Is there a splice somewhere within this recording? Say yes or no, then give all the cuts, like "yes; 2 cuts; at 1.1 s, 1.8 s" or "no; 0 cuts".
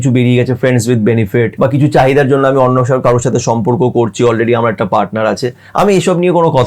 yes; 1 cut; at 1.5 s